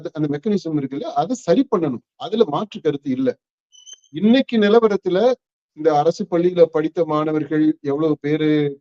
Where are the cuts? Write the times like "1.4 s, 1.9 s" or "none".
4.1 s